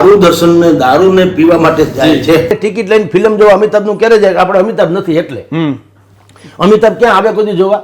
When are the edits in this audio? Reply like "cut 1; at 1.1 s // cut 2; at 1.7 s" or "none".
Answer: cut 1; at 2.5 s